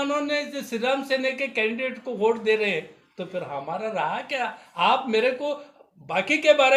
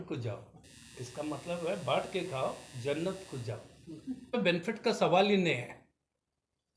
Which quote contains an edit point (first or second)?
second